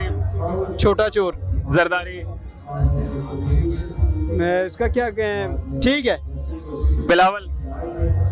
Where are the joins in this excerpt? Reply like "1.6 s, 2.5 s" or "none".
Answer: none